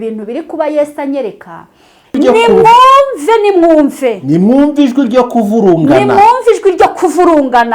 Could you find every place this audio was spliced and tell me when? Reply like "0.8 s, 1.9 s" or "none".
2.2 s